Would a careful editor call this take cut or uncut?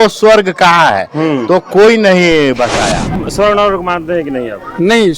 cut